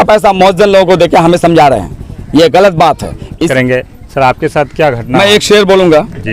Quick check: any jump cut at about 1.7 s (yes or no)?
no